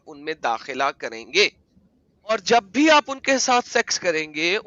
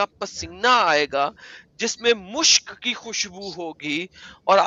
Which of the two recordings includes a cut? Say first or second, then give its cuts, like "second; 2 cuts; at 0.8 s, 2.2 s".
first; 1 cut; at 2.3 s